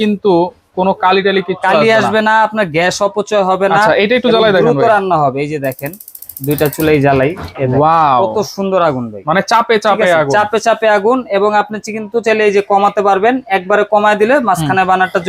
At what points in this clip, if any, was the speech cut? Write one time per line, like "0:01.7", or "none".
none